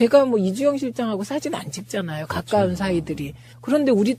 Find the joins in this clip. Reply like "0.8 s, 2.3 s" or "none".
1.2 s